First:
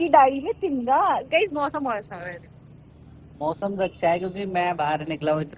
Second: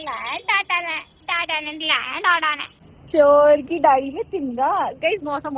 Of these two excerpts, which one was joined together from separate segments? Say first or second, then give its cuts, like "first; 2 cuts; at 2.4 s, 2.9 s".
second; 1 cut; at 2.7 s